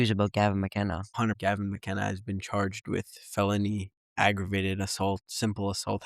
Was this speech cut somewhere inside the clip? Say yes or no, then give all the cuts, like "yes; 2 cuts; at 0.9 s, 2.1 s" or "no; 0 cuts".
yes; 1 cut; at 1.3 s